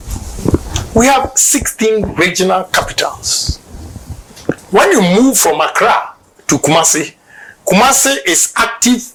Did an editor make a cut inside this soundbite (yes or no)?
no